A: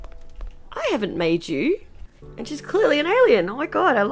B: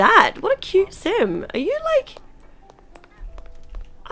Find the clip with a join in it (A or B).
A